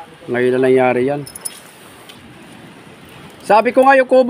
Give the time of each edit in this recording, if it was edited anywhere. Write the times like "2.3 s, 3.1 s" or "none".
2.2 s